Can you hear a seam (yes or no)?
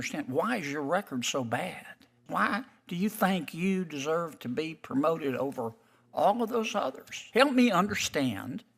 yes